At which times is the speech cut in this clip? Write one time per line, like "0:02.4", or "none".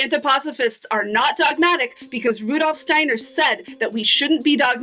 none